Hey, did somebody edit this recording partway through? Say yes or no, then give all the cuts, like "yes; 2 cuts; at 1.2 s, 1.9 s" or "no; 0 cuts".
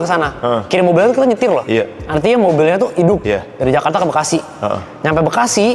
no; 0 cuts